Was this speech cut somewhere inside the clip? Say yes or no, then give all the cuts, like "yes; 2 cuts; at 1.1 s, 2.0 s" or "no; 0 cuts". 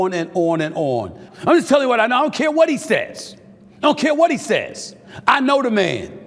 yes; 1 cut; at 1.4 s